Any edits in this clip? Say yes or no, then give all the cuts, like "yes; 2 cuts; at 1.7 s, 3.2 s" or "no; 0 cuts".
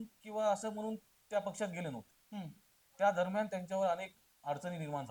no; 0 cuts